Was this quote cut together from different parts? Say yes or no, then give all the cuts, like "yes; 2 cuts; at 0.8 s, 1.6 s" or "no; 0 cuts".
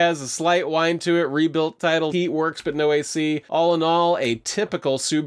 yes; 1 cut; at 2.1 s